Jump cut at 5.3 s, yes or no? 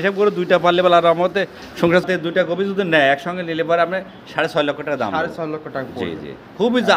no